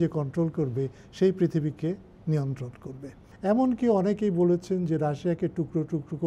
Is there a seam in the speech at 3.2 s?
yes; 1 cut; at 3.2 s

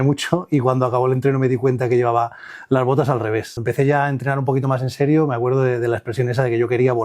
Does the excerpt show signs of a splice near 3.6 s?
yes; 1 cut; at 3.6 s

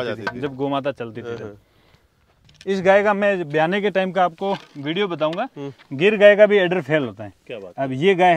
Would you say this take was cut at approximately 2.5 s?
yes; 1 cut; at 2.5 s

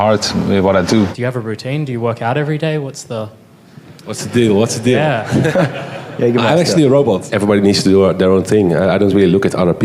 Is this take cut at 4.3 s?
no; 2 cuts; at 1.2 s, 7.3 s

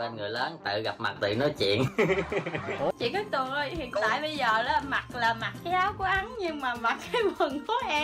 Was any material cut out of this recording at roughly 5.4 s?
no; 1 cut; at 2.9 s

